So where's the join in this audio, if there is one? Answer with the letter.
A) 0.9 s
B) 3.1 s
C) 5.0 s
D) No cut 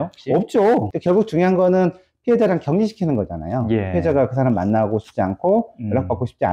A